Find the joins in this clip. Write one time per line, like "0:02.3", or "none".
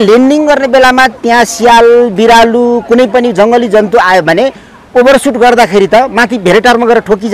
none